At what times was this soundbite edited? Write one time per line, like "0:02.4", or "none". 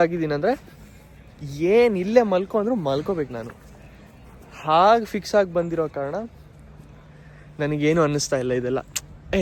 none